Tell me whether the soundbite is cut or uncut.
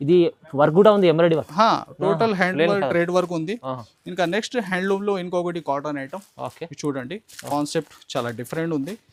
uncut